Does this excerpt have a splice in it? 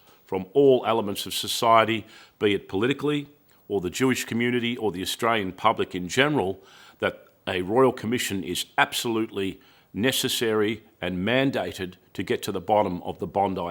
no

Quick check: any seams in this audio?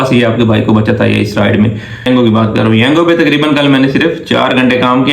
yes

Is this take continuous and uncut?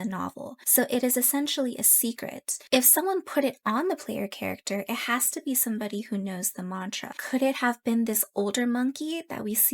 no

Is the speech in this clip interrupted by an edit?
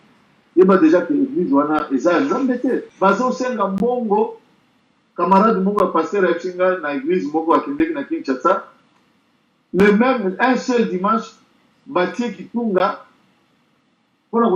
yes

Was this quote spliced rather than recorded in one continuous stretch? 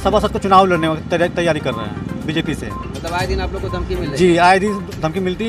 no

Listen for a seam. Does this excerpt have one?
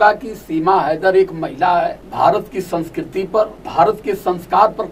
yes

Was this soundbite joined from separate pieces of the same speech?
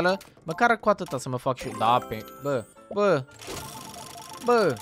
yes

